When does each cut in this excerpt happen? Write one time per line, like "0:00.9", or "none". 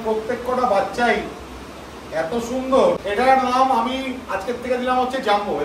0:03.0

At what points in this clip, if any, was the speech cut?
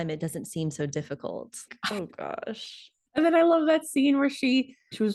0:01.6

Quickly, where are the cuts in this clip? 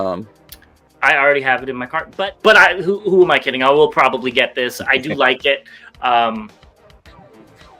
0:02.0

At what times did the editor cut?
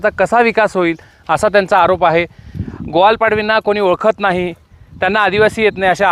none

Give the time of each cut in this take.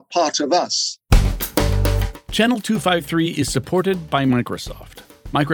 0:01.0

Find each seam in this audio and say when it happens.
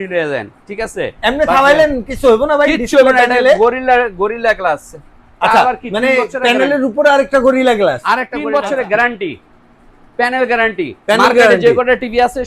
0:08.3

